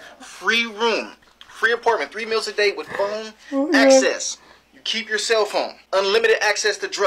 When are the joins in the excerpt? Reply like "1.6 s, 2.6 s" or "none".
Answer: 5.8 s

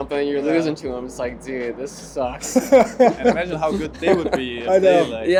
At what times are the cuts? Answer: none

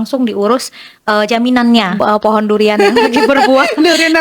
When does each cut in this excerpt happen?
2.0 s

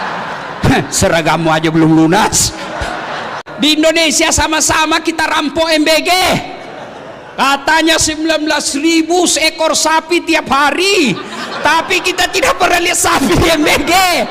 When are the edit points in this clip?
3.4 s

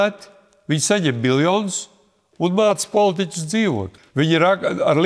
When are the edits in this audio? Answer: 3.9 s

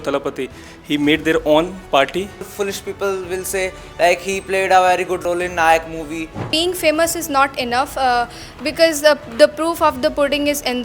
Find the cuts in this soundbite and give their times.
2.5 s, 5.2 s, 6.4 s

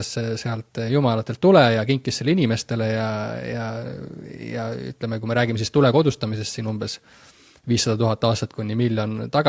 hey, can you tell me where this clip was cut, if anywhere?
none

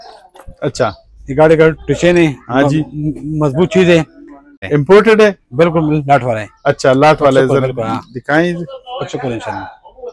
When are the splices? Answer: 4.6 s

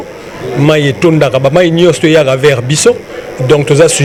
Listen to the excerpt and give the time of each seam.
none

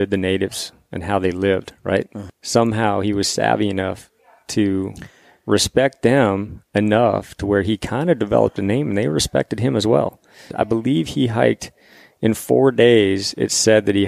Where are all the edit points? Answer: 2.2 s, 10.5 s

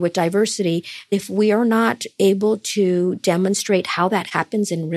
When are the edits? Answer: 1.1 s

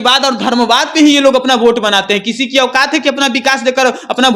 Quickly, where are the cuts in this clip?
none

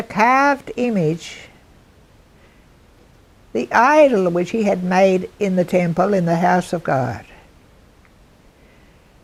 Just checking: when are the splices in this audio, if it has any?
none

